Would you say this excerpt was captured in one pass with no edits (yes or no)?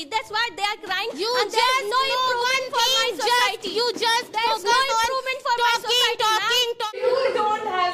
no